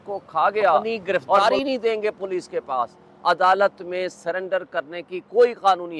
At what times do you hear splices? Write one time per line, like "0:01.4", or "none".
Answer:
0:01.4